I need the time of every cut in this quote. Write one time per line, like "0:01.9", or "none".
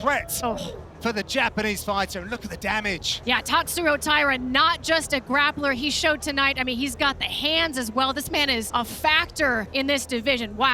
0:03.1
0:08.7
0:09.7